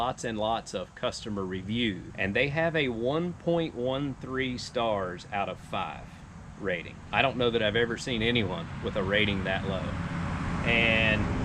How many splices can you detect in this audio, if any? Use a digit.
2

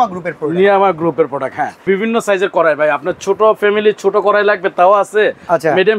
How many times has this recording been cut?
1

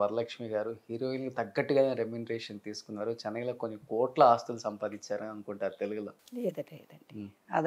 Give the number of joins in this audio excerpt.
0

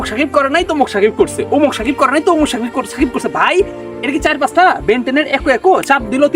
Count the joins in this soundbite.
0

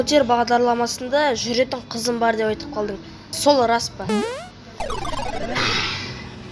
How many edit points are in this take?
1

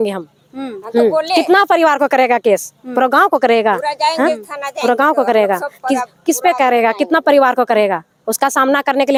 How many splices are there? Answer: 0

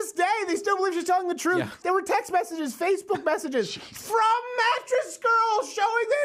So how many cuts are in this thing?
1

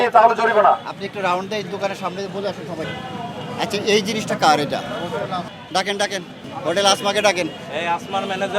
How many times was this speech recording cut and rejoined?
3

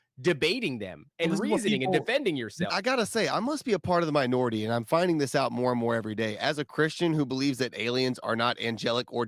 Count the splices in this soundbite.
1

